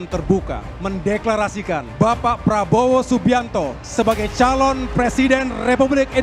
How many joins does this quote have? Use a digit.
0